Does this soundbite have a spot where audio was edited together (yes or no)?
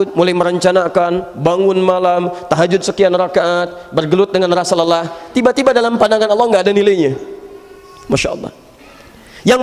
no